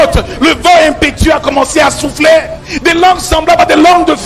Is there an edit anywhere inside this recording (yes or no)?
yes